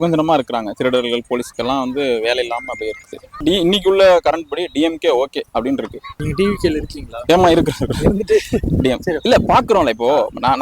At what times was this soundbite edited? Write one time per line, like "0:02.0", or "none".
0:03.4
0:06.2